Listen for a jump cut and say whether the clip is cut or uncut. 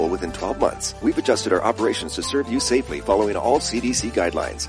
uncut